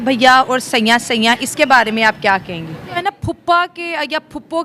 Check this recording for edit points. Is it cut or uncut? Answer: cut